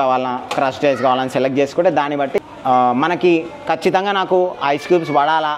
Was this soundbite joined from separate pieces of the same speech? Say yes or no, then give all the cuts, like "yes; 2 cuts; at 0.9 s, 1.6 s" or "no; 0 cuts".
yes; 1 cut; at 2.4 s